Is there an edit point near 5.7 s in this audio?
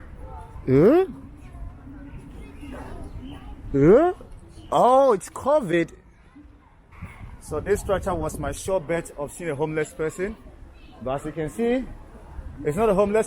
no; 0 cuts

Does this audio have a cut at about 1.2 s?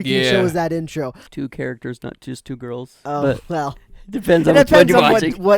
yes; 1 cut; at 1.2 s

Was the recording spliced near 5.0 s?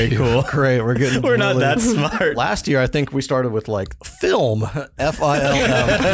no; 1 cut; at 2.4 s

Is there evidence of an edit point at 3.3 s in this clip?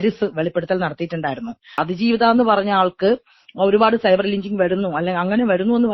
no; 1 cut; at 1.7 s

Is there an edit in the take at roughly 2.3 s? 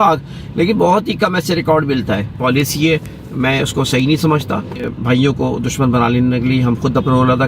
yes; 2 cuts; at 2.3 s, 4.9 s

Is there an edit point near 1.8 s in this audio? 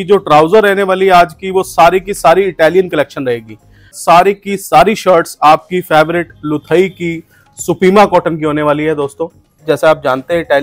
no; 2 cuts; at 4.0 s, 9.6 s

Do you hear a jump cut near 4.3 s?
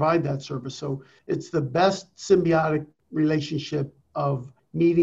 yes; 3 cuts; at 1.1 s, 3.0 s, 4.3 s

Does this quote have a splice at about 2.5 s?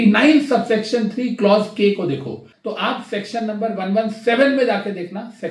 yes; 1 cut; at 2.5 s

